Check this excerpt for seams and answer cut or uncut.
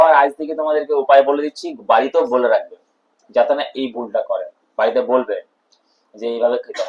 uncut